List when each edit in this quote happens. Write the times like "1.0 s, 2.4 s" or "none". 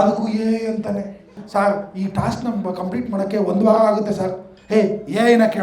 1.4 s